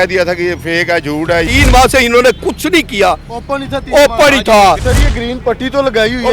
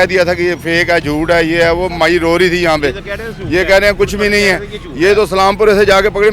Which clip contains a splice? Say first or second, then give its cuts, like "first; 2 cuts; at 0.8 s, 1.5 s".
first; 2 cuts; at 1.5 s, 4.9 s